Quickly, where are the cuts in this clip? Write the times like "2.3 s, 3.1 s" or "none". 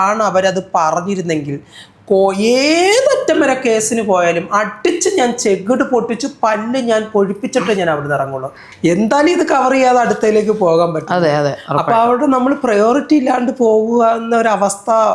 8.6 s